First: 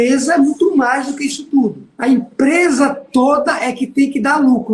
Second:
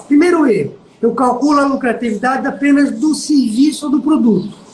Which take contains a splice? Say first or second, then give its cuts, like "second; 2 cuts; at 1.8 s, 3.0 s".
first; 1 cut; at 1.9 s